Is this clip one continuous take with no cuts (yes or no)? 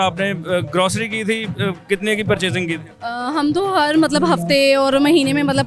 no